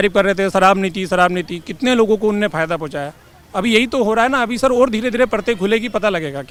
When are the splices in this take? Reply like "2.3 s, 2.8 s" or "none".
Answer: none

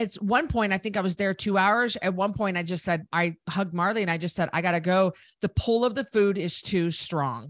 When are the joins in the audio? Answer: none

